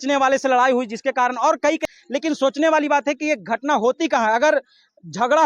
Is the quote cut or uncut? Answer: cut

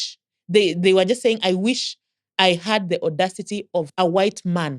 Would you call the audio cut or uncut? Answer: cut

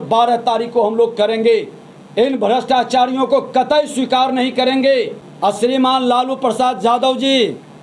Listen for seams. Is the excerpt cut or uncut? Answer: cut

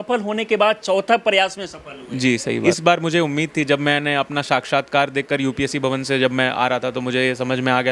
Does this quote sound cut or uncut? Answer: cut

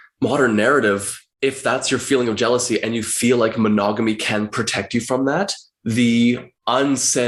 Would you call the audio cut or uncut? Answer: uncut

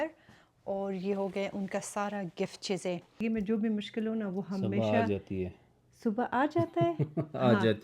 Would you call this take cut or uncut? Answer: cut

